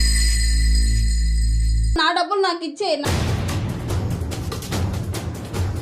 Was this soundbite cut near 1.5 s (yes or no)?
no